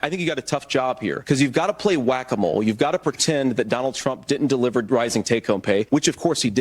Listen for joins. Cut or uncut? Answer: cut